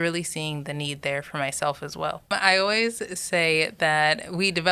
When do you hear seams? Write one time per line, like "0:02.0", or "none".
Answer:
0:02.3